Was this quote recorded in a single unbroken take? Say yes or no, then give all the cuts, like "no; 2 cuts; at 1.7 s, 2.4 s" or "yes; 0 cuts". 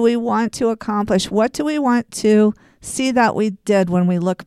yes; 0 cuts